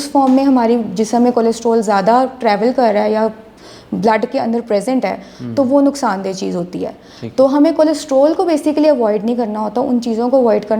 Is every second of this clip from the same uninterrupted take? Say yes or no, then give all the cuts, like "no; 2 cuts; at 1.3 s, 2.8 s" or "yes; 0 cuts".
yes; 0 cuts